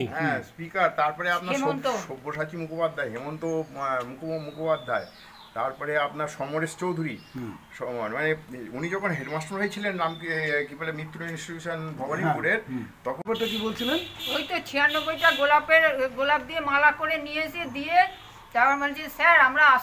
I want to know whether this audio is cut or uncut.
cut